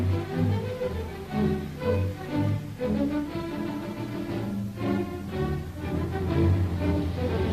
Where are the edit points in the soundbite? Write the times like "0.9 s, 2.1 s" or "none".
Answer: 6.3 s